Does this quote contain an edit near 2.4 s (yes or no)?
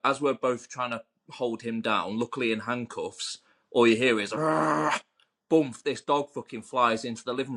no